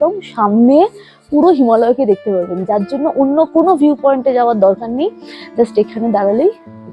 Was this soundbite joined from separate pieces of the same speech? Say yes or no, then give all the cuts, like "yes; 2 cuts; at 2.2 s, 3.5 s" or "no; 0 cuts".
no; 0 cuts